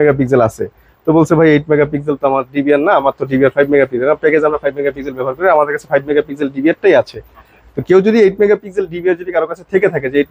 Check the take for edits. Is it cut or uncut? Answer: uncut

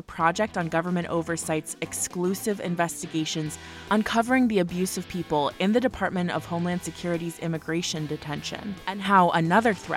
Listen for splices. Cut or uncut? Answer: cut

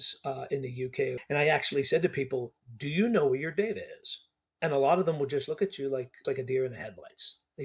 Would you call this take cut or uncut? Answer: cut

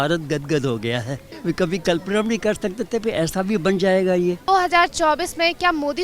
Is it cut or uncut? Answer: cut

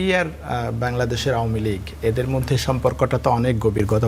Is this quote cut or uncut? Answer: uncut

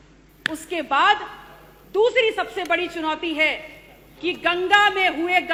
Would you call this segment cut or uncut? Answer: uncut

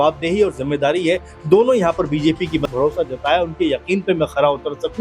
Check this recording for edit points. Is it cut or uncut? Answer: cut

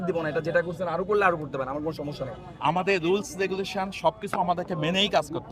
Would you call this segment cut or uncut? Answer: cut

